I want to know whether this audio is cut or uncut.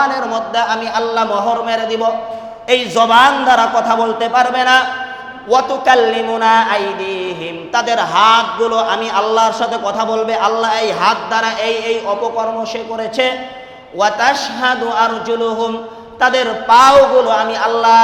uncut